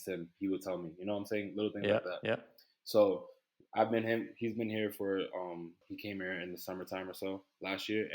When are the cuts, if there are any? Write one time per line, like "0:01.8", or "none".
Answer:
0:05.9